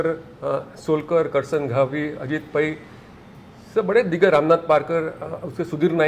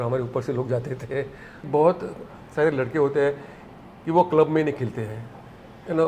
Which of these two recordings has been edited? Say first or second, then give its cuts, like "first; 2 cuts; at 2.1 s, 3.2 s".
second; 1 cut; at 1.6 s